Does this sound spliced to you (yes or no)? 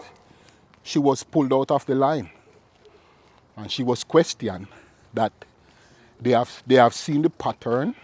no